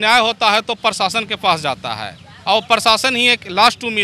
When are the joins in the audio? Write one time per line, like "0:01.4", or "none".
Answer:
none